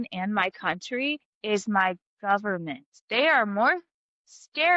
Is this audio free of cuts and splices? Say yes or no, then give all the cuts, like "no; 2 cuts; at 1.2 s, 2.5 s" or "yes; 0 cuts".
no; 1 cut; at 2.9 s